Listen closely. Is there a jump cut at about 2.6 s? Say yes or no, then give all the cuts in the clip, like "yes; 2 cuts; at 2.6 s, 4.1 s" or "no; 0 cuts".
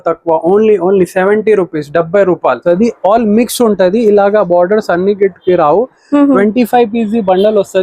yes; 1 cut; at 2.6 s